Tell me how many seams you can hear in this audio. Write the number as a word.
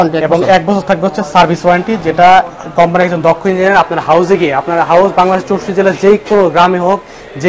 zero